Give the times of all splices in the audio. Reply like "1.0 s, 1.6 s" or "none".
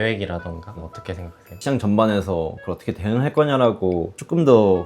1.6 s